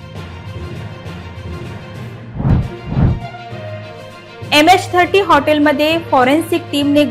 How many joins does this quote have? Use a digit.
1